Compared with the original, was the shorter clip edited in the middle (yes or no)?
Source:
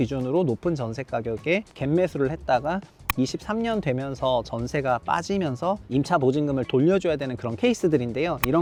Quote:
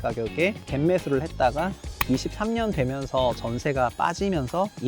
no